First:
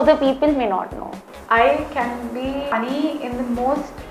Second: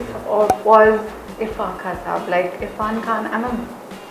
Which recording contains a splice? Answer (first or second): first